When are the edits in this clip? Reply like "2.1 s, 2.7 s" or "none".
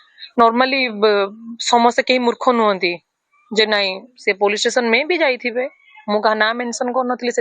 2.0 s